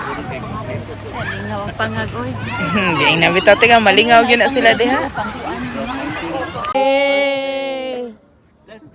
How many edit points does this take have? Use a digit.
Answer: 1